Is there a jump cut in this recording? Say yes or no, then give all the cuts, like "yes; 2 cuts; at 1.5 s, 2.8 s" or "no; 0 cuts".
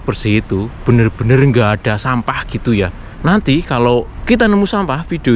yes; 2 cuts; at 3.1 s, 4.1 s